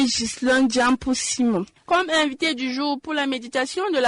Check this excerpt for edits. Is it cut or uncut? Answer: cut